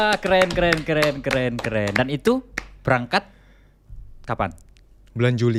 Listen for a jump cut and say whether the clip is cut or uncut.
uncut